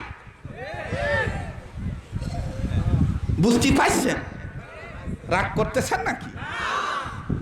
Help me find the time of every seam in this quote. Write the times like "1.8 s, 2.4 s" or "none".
none